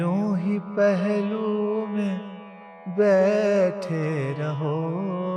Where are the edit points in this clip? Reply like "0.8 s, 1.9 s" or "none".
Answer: none